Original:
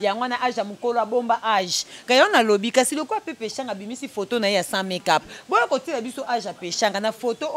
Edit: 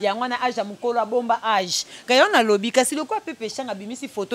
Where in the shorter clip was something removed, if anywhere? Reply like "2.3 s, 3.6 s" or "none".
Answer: none